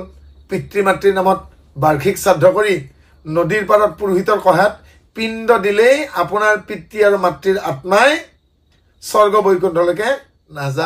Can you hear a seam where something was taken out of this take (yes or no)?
no